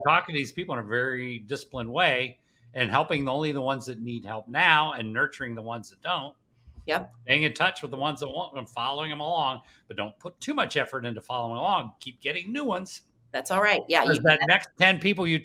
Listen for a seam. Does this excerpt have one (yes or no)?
no